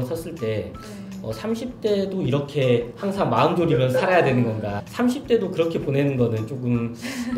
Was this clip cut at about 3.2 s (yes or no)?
no